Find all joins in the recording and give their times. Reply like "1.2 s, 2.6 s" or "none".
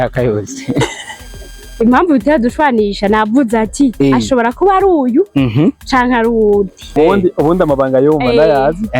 7.0 s